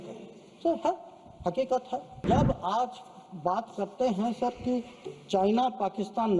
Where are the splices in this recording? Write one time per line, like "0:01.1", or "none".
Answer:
0:02.2